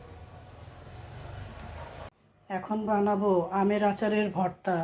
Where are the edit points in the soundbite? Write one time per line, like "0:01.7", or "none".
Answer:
0:02.1